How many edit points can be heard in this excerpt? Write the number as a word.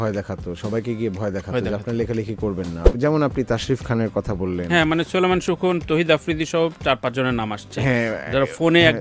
one